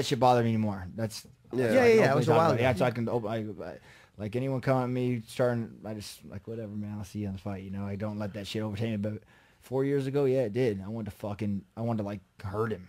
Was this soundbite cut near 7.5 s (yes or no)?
yes